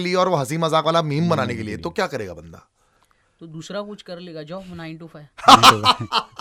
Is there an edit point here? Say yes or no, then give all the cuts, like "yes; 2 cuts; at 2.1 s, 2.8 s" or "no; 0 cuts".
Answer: no; 0 cuts